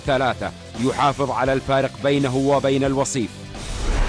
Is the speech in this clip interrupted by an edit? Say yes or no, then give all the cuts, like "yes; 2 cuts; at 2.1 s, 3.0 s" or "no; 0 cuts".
yes; 1 cut; at 3.1 s